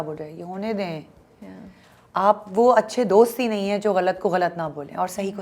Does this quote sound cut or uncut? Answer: uncut